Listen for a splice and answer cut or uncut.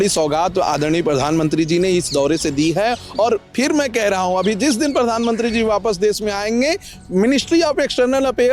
uncut